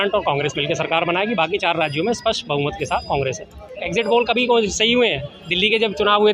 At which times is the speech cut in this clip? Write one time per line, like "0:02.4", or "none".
0:03.6